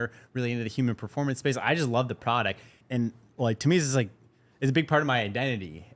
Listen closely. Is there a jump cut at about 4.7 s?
no; 1 cut; at 2.8 s

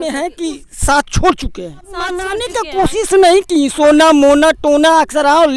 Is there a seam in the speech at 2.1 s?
yes; 1 cut; at 2.1 s

